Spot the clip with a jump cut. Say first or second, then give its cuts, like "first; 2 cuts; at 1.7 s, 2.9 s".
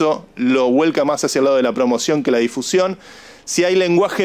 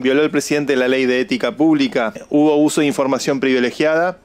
second; 1 cut; at 2.2 s